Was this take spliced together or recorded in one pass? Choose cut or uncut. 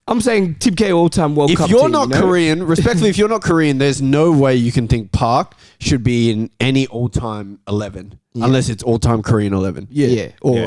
uncut